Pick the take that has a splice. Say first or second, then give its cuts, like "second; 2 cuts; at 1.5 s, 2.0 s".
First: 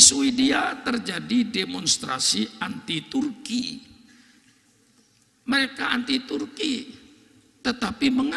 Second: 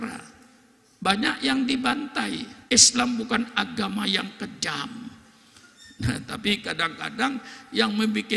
second; 1 cut; at 2.5 s